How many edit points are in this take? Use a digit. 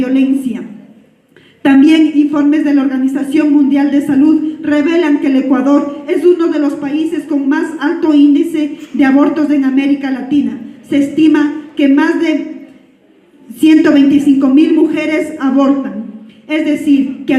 0